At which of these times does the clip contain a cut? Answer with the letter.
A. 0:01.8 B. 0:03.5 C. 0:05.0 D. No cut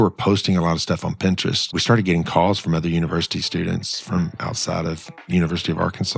A